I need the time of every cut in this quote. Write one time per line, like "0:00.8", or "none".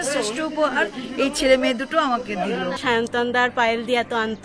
0:02.8